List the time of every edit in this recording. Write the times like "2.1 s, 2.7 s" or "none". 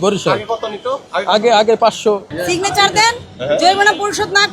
2.3 s